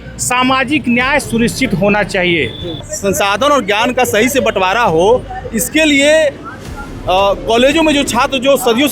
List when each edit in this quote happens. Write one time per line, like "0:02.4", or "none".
0:02.7